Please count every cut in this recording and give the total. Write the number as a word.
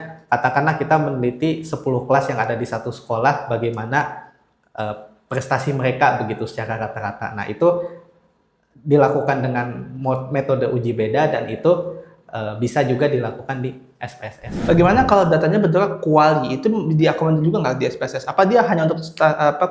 one